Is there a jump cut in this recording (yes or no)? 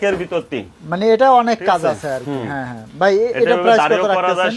no